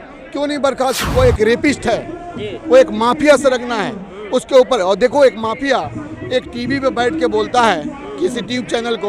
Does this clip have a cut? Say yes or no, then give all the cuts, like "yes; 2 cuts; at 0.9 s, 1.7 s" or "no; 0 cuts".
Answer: yes; 1 cut; at 1.0 s